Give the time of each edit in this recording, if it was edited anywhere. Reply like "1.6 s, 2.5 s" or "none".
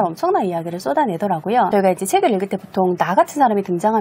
none